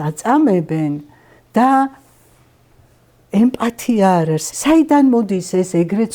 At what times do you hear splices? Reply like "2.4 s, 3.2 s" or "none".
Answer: 4.4 s